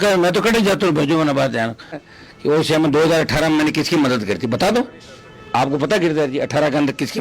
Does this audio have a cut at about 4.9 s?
no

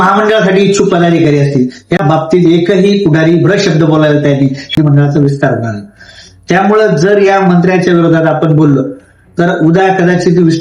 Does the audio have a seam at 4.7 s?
yes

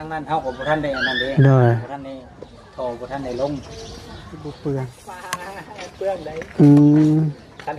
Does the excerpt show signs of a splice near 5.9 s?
no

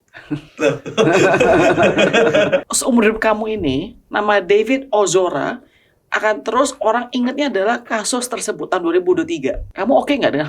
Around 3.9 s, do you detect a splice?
no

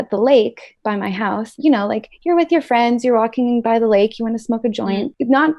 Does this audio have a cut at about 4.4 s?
no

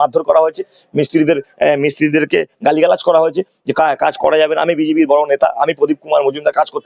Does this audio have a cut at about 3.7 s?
no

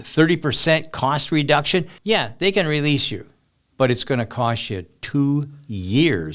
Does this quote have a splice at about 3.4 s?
no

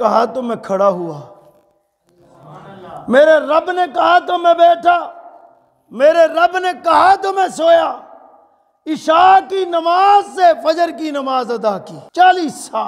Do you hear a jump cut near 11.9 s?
yes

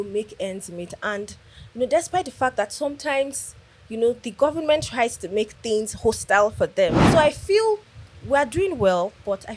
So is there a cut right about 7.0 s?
yes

